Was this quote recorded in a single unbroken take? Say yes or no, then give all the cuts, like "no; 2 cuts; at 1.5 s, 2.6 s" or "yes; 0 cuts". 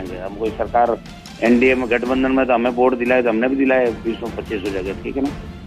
yes; 0 cuts